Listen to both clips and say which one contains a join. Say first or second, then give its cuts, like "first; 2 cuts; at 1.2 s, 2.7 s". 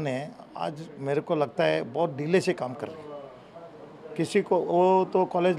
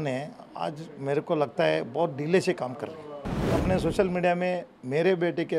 second; 1 cut; at 3.5 s